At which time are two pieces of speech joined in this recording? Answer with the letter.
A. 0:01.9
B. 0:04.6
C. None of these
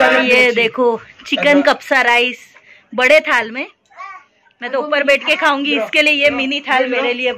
C